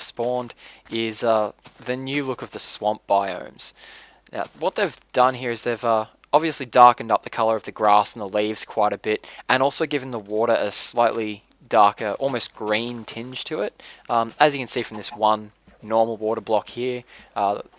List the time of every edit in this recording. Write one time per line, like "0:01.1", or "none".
none